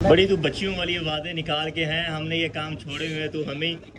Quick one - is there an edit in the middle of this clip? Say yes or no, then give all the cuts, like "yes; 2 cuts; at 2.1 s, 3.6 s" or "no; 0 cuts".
no; 0 cuts